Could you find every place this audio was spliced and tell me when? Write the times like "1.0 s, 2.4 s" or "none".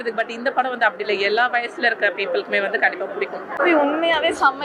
none